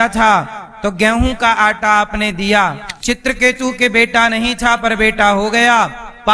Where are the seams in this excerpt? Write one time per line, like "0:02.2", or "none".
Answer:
0:02.9